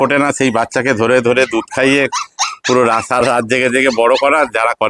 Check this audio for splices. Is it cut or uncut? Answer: uncut